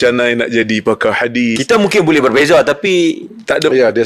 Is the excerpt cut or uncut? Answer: uncut